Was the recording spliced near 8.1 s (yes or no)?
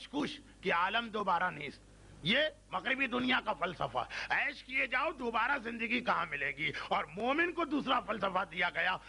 yes